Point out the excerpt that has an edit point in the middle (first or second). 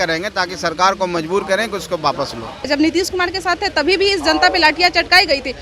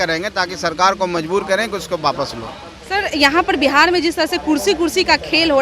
first